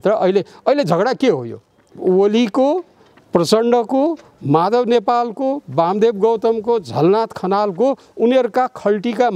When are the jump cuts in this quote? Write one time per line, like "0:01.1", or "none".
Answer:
0:01.9